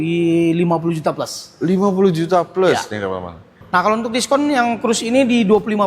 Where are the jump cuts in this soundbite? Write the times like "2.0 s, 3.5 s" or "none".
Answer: 3.5 s